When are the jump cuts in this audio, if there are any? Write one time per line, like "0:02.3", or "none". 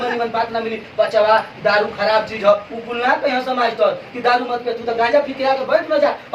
none